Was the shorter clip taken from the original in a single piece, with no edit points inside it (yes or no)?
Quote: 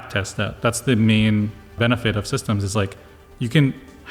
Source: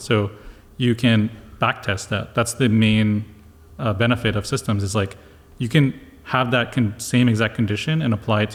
no